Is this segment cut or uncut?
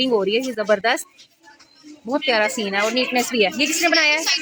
uncut